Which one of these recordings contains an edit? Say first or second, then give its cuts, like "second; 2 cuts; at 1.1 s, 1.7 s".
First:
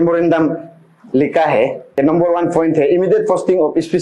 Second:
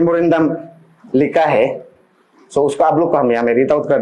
first; 1 cut; at 2.0 s